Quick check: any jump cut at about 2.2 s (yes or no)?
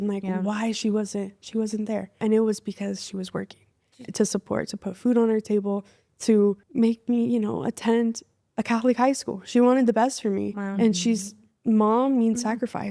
yes